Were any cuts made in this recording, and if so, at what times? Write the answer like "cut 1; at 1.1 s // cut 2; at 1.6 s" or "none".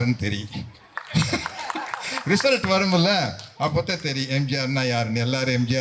none